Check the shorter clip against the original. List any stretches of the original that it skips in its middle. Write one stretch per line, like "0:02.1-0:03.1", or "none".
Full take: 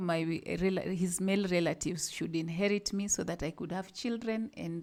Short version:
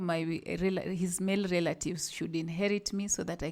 none

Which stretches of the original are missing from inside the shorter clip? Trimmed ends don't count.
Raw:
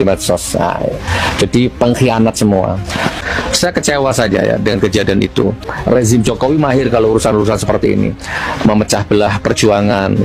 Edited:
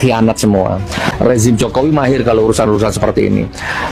0:03.1-0:05.8

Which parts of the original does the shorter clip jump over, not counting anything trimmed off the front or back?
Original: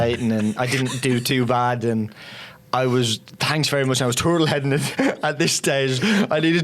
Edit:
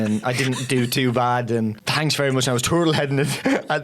0:02.2-0:03.4

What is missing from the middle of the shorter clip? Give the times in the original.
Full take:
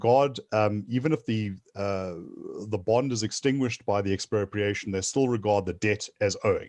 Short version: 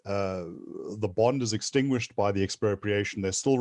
none

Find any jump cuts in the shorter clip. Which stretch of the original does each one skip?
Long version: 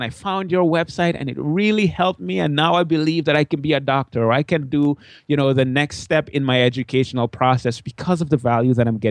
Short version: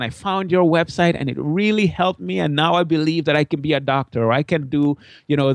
none

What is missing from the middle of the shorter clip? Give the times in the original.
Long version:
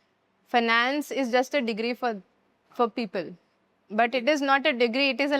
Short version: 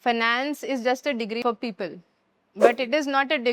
0:01.9-0:02.8

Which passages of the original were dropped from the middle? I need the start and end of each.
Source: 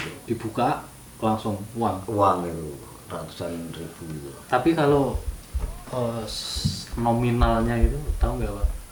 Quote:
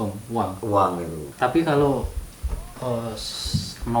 0:02.7-0:04.3

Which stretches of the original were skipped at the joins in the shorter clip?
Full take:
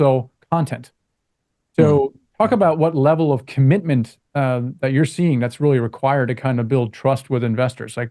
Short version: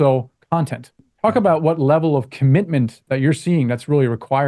0:01.1-0:02.2
0:04.2-0:04.7

